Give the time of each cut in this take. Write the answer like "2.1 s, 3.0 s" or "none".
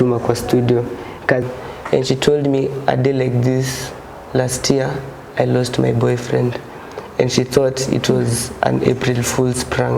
1.4 s

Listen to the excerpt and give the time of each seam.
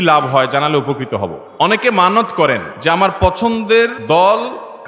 1.4 s, 2.7 s, 4.0 s

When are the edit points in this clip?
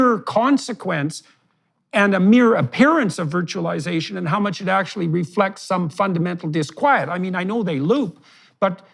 none

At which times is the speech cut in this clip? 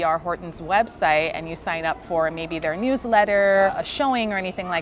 3.7 s

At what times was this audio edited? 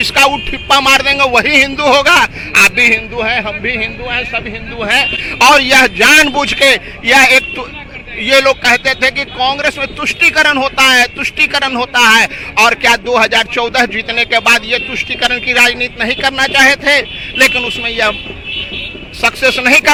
none

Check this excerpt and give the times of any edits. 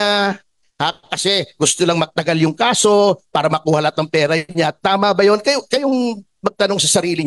none

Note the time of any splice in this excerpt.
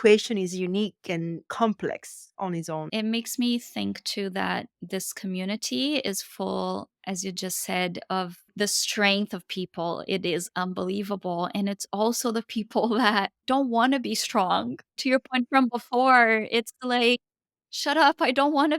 2.9 s

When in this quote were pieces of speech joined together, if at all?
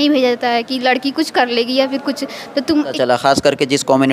2.9 s

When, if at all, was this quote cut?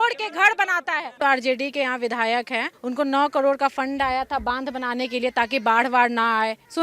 1.1 s

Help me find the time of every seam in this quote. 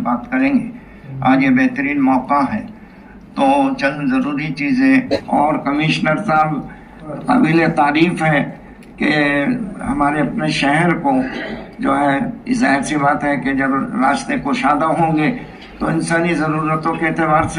5.1 s

